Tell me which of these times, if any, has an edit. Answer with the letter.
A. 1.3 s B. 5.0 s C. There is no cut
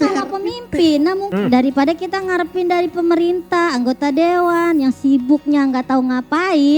A